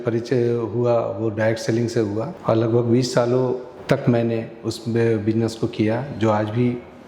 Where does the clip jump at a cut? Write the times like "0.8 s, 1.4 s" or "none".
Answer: 2.3 s